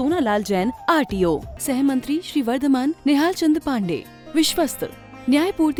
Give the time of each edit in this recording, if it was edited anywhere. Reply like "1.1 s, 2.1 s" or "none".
none